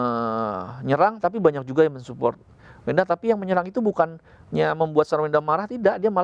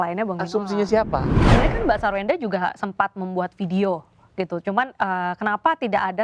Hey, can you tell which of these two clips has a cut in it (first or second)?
second